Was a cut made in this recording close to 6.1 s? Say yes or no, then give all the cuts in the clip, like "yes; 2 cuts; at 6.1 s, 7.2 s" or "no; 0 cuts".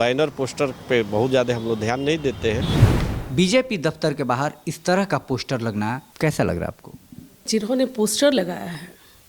yes; 3 cuts; at 2.8 s, 6.1 s, 7.5 s